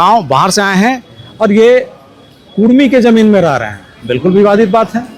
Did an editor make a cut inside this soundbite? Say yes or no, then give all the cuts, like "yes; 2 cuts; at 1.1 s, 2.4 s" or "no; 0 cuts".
no; 0 cuts